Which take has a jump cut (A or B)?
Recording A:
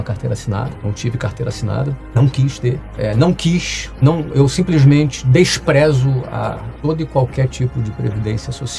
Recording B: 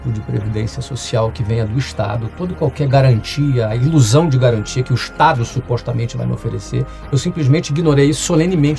A